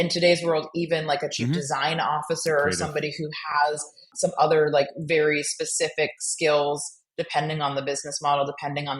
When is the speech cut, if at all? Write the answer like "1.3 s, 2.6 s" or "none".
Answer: 4.1 s